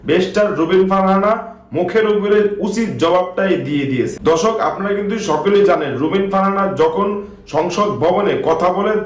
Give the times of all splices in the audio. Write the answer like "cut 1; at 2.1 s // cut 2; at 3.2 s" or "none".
none